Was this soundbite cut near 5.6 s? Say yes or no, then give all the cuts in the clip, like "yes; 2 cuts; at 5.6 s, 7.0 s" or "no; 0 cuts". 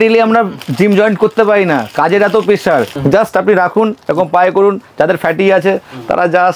no; 1 cut; at 2.9 s